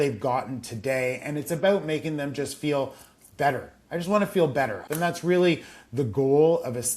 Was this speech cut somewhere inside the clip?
yes; 1 cut; at 4.8 s

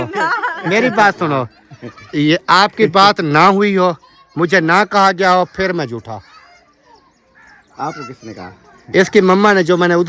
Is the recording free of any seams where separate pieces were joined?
yes; 0 cuts

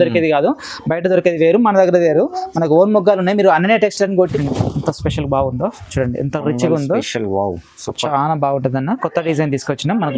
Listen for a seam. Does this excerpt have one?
yes; 1 cut; at 4.4 s

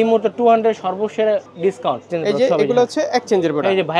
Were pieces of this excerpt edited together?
yes; 1 cut; at 1.8 s

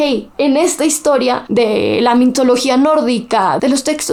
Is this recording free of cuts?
yes; 0 cuts

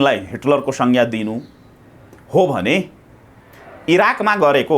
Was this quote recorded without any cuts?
yes; 0 cuts

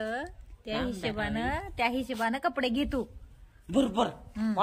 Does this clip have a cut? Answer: no; 0 cuts

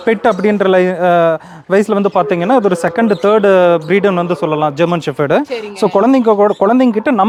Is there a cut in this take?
no; 0 cuts

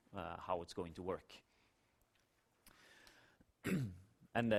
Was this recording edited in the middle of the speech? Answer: no; 0 cuts

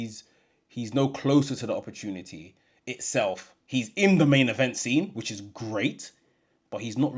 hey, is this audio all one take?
yes; 0 cuts

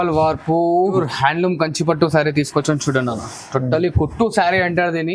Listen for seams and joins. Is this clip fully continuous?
no; 1 cut; at 0.9 s

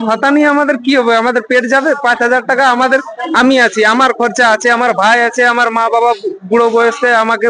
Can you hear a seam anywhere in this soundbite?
no; 0 cuts

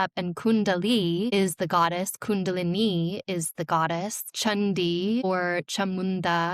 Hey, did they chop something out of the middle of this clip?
yes; 3 cuts; at 1.3 s, 4.2 s, 5.2 s

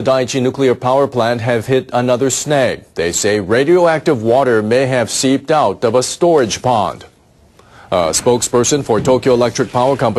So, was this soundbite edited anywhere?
no; 0 cuts

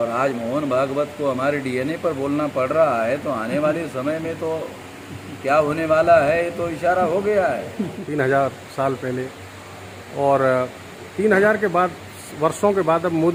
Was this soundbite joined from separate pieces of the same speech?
no; 0 cuts

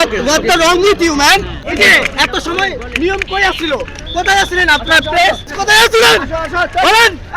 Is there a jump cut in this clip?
yes; 2 cuts; at 1.6 s, 5.5 s

